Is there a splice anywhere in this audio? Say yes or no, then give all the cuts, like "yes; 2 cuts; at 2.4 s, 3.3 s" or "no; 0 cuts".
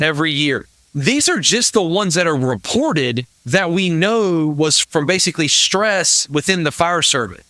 yes; 2 cuts; at 3.3 s, 4.8 s